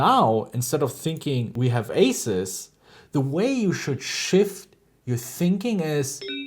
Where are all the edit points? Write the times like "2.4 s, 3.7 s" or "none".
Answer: 1.5 s